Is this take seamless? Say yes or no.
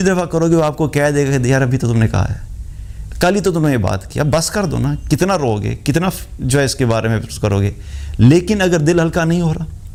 yes